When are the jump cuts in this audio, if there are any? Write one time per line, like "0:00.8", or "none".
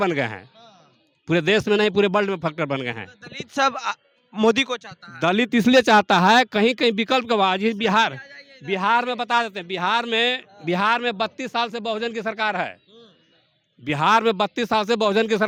none